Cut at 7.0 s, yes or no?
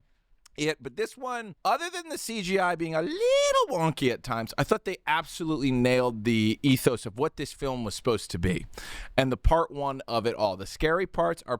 no